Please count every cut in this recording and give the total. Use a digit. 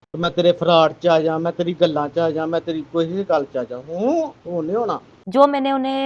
1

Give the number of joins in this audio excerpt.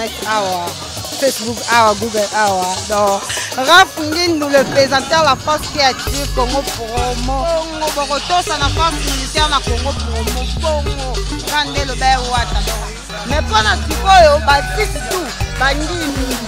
0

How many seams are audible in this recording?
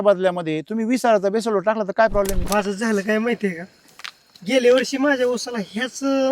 1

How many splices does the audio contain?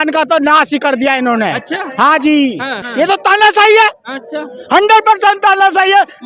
1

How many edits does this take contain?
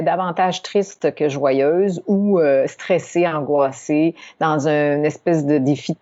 0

